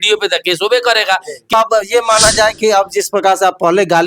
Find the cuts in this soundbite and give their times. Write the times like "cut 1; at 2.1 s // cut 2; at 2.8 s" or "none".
cut 1; at 1.5 s